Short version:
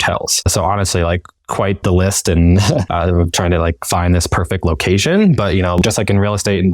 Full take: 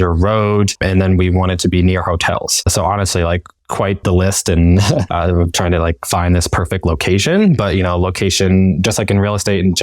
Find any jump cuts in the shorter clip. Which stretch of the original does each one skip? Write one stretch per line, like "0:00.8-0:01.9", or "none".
0:08.0-0:08.8

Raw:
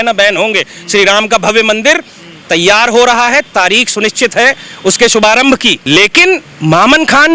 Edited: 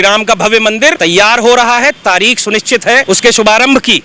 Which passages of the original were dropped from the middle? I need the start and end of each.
0:02.0-0:02.5
0:04.5-0:04.8

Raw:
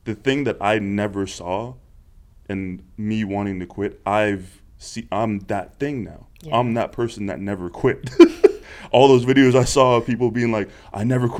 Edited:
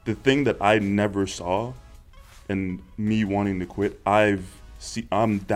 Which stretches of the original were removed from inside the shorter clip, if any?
none

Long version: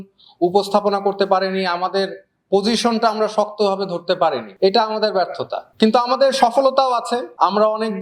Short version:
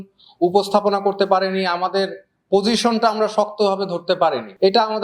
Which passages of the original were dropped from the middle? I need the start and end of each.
none

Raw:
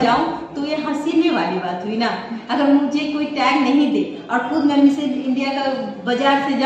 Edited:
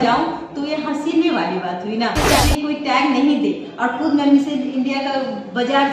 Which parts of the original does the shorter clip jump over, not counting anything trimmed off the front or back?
0:02.4-0:02.9

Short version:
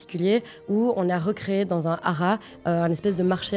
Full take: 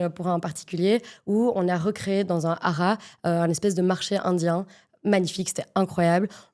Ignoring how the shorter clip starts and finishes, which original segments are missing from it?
none

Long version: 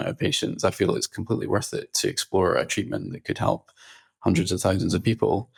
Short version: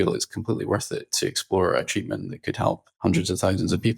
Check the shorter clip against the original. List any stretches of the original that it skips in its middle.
0:03.7-0:04.1

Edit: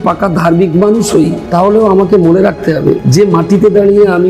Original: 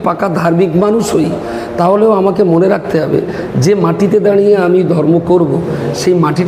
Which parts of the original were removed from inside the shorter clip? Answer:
0:01.4-0:01.7
0:03.3-0:03.5

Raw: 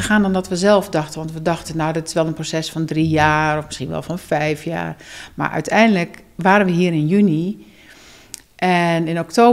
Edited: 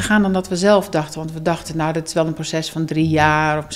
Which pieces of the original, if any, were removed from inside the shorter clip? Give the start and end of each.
none

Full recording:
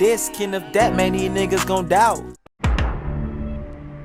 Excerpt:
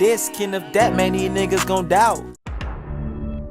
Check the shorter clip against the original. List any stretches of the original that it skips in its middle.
0:02.6-0:02.7

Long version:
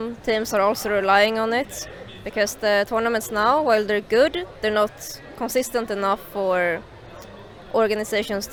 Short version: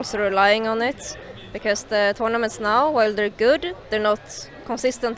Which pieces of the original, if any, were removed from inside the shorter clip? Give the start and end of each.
none

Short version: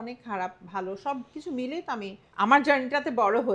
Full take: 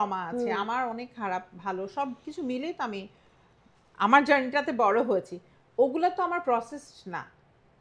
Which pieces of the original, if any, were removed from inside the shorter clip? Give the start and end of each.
0:03.1-0:03.8

